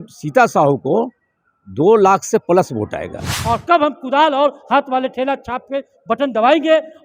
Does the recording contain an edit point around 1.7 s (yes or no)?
no